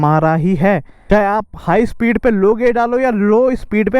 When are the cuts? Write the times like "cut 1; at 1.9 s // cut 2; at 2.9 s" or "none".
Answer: cut 1; at 0.9 s